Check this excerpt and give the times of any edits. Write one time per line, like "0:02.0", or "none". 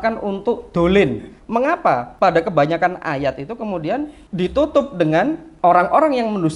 0:01.7
0:04.2
0:05.5